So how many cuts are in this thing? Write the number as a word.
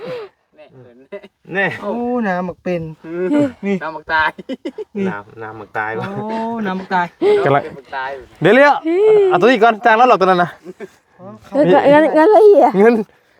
zero